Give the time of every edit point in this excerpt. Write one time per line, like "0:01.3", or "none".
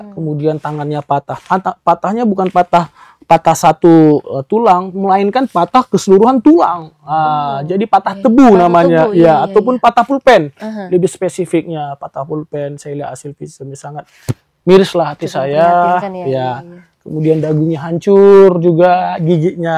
none